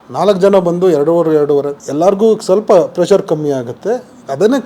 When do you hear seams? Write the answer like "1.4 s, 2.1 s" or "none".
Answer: 1.8 s